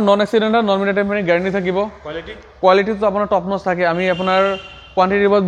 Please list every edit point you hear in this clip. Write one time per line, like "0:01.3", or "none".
none